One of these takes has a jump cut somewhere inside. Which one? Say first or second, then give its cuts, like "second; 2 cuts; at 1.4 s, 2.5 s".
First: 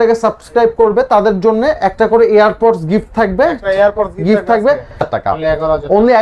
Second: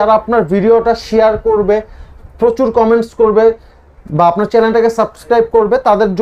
first; 1 cut; at 5.0 s